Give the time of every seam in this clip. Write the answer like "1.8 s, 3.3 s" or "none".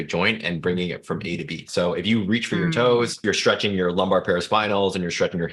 1.6 s, 3.2 s